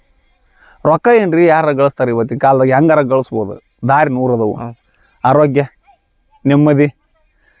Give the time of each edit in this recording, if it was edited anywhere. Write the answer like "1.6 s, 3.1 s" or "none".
none